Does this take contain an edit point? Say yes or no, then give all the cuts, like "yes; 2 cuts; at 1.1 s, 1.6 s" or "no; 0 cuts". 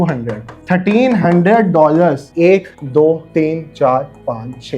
yes; 1 cut; at 2.3 s